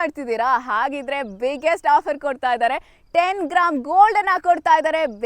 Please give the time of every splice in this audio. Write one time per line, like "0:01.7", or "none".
none